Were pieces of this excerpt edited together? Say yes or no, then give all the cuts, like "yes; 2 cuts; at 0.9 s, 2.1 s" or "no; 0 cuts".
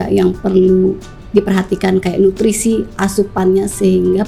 no; 0 cuts